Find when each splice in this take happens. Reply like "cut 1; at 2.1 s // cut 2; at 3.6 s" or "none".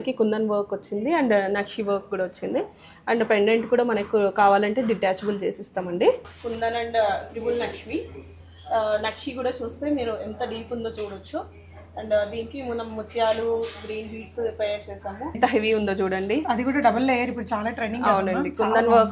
cut 1; at 6.3 s // cut 2; at 15.4 s

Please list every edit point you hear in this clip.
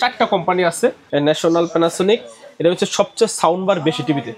cut 1; at 1.0 s

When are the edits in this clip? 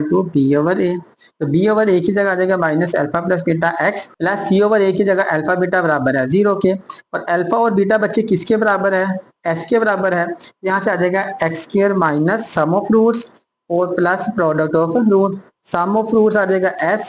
none

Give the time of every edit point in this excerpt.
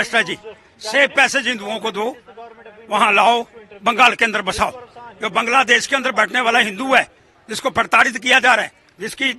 none

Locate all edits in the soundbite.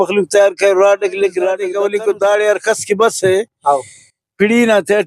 cut 1; at 1.7 s

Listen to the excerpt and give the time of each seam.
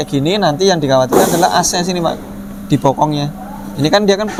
none

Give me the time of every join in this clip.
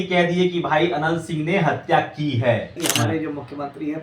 cut 1; at 2.7 s

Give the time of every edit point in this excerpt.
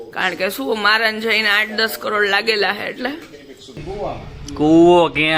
cut 1; at 3.8 s

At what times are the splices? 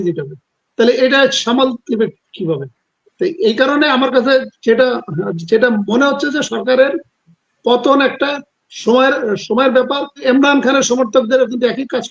cut 1; at 10.2 s

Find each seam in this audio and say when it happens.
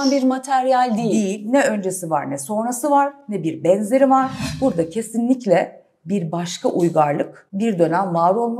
cut 1; at 4.4 s // cut 2; at 7.4 s

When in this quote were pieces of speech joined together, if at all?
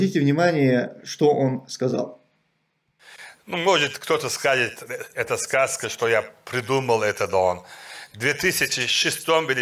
none

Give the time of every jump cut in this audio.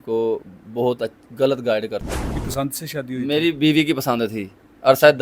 cut 1; at 2.4 s

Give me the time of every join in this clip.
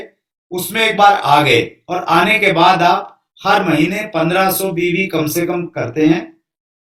none

